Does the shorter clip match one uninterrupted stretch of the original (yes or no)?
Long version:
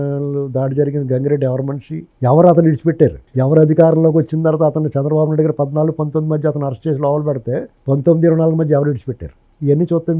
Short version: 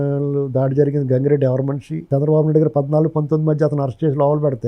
no